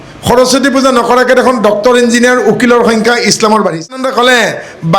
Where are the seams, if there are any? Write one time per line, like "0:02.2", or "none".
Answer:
0:04.0